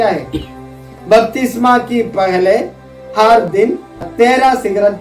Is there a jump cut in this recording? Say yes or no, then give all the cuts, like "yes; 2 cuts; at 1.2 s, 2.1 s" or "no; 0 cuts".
yes; 1 cut; at 4.1 s